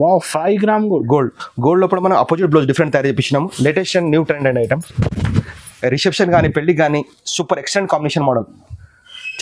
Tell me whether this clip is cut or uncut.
uncut